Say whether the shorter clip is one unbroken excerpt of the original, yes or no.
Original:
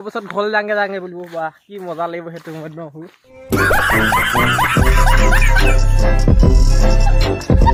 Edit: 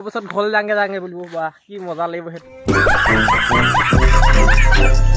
no